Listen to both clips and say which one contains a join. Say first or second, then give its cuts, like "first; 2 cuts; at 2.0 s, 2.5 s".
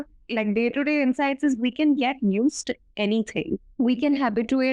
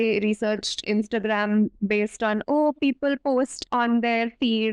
first; 1 cut; at 3.7 s